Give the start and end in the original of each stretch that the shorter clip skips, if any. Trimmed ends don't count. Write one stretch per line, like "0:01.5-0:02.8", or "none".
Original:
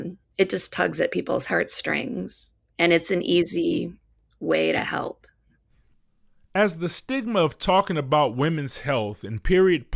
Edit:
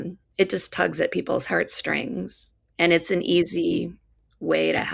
none

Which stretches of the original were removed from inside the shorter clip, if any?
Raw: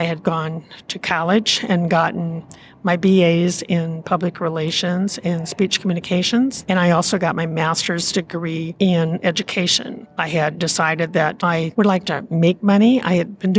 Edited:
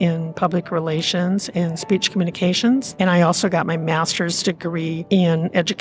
none

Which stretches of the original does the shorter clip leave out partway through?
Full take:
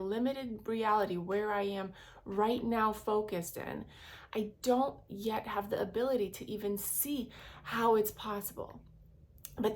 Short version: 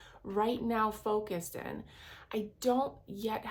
none

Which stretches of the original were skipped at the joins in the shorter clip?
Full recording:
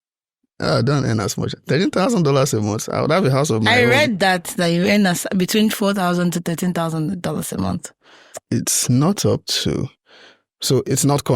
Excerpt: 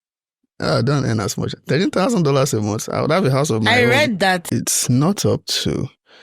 0:04.4-0:08.4

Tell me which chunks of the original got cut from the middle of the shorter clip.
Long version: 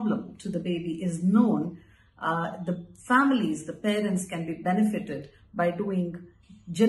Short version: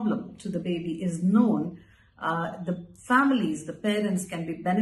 none

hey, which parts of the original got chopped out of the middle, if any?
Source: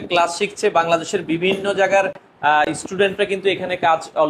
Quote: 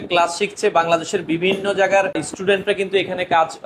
0:02.3-0:02.8

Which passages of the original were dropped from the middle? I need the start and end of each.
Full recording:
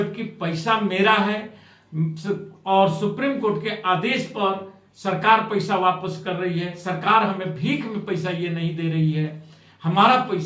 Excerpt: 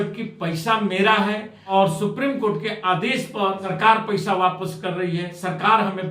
0:01.5-0:02.6
0:04.7-0:05.1

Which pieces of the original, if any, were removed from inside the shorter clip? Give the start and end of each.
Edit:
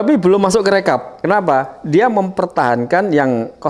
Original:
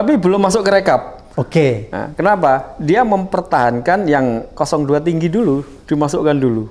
0:01.1-0:02.1

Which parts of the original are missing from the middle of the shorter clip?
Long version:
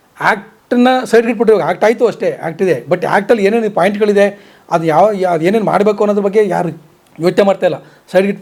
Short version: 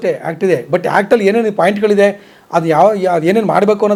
none

